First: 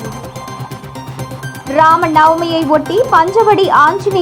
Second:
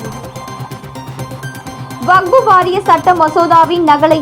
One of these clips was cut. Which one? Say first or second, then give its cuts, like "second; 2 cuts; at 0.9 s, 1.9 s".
first; 1 cut; at 1.6 s